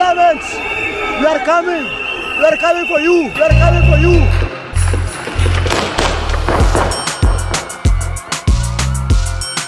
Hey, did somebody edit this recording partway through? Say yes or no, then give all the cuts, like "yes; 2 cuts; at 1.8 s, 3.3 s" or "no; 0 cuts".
no; 0 cuts